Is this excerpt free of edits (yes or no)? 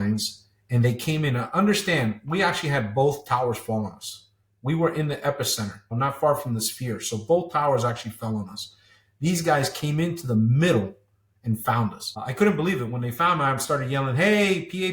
yes